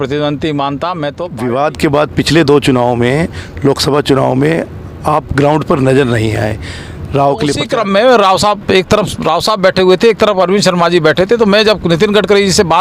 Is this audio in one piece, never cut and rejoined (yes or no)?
no